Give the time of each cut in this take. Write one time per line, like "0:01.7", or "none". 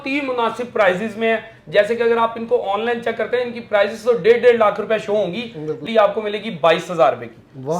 0:05.8